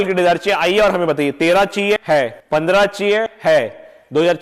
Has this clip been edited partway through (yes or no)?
yes